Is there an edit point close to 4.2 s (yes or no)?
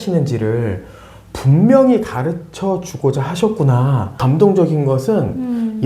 yes